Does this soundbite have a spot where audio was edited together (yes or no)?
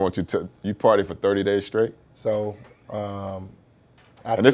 yes